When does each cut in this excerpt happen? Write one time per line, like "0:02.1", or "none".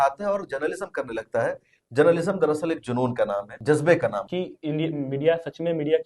0:03.5
0:04.2